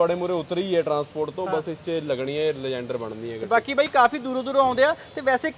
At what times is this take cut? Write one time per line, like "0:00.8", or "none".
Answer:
none